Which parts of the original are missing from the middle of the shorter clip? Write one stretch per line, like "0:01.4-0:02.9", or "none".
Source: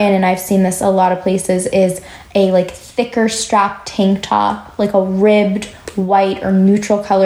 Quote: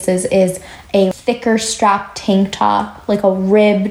0:02.5-0:02.8

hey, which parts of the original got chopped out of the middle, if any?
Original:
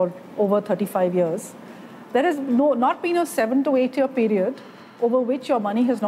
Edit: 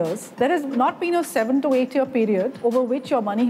0:02.0-0:02.8
0:04.6-0:04.9

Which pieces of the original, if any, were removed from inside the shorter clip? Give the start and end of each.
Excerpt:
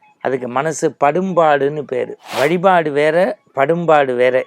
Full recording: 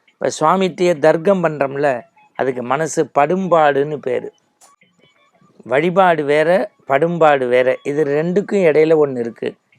0:04.3-0:05.5

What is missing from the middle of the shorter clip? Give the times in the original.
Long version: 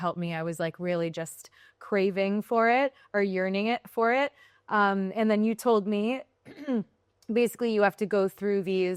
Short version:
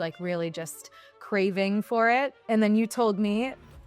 0:03.0-0:05.1

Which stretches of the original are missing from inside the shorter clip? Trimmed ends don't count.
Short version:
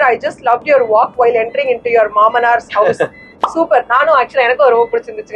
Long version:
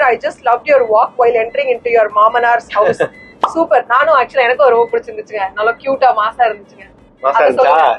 none

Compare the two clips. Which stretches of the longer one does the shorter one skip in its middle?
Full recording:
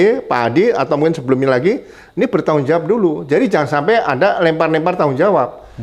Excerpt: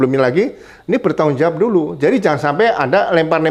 none

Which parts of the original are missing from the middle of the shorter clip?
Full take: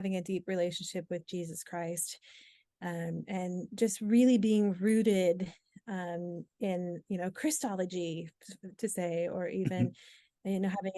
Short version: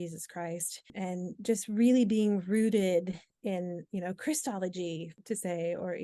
0:02.3-0:03.2
0:05.6-0:06.5
0:08.3-0:08.6

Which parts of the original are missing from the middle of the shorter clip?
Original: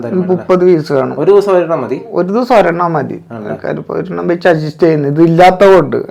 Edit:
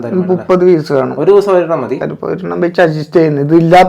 0:02.0-0:03.7

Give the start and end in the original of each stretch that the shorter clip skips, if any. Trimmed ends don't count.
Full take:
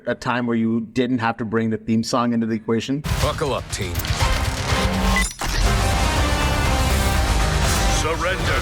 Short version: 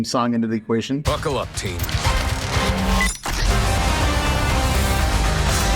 0:03.0-0:03.2

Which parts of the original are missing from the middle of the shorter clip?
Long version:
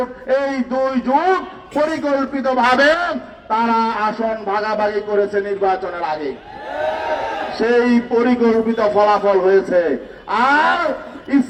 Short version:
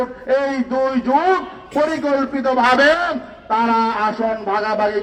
none

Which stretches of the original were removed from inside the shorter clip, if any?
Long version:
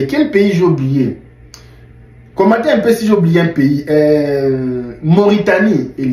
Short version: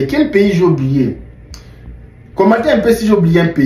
none

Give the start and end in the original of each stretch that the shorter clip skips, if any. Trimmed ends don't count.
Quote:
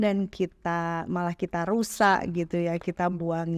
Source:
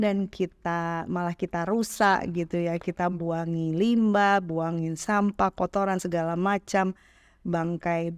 none

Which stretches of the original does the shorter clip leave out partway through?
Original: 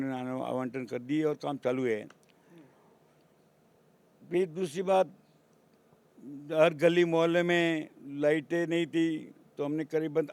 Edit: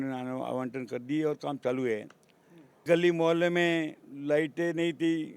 0:02.8-0:06.8

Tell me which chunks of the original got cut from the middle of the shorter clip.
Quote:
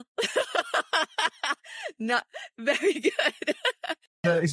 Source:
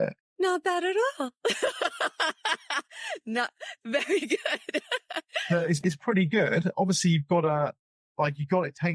none

